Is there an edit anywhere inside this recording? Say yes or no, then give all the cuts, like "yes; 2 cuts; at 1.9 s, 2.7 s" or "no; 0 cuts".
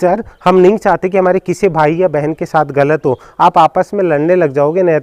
no; 0 cuts